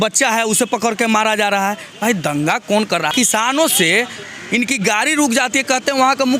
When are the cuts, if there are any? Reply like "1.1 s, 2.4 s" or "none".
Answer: 3.1 s